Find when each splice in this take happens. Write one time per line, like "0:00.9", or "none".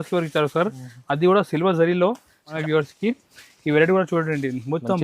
0:02.5